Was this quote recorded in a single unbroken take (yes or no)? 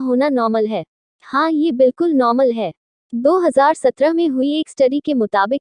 no